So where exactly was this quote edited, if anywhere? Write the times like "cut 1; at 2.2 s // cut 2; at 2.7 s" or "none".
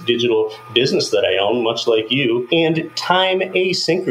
cut 1; at 2.5 s